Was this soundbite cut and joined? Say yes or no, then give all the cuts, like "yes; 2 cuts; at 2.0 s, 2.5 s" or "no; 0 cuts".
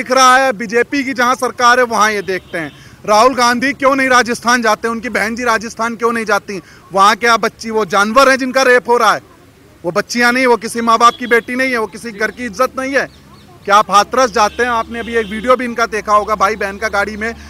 no; 0 cuts